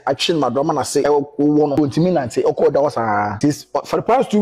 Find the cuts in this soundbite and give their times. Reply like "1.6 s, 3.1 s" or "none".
1.0 s, 1.7 s, 3.3 s